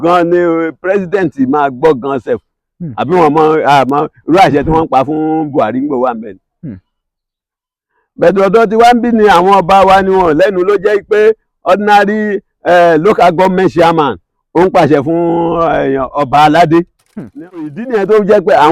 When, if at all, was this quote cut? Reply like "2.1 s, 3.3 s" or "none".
17.7 s